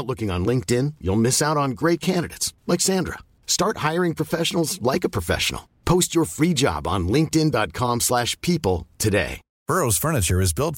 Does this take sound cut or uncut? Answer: cut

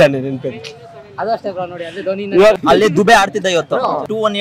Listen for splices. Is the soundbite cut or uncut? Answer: uncut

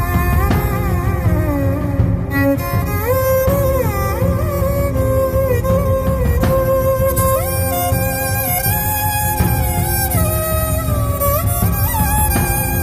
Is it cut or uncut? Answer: uncut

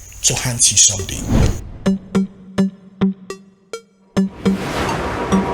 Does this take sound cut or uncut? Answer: cut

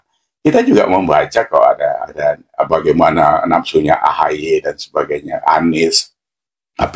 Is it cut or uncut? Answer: uncut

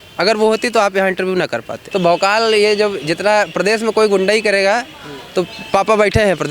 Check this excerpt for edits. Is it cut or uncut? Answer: cut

